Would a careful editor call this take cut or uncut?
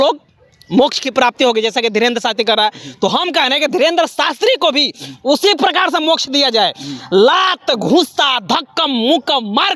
uncut